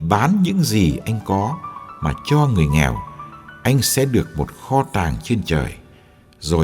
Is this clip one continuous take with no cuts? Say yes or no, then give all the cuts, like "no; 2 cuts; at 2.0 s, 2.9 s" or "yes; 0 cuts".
no; 1 cut; at 1.7 s